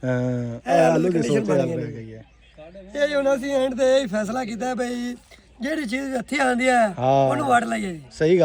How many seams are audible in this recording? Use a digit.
0